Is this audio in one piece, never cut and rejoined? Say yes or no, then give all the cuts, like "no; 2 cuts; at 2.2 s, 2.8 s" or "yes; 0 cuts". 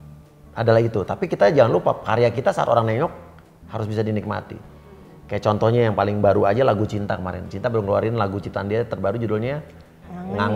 yes; 0 cuts